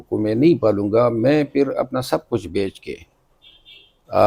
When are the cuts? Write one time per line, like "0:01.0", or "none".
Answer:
none